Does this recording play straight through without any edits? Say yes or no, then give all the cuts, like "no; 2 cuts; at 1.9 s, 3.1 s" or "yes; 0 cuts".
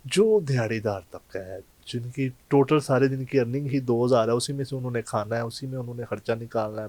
yes; 0 cuts